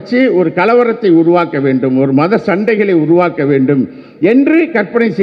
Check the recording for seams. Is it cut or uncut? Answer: uncut